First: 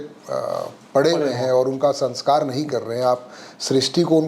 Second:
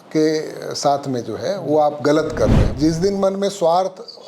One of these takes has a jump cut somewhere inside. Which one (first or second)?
second